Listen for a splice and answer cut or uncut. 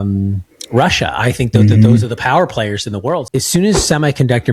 cut